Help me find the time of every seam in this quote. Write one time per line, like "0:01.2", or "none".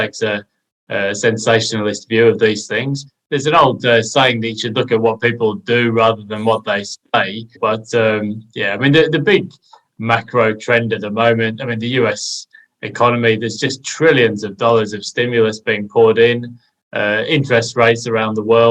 0:03.0
0:07.5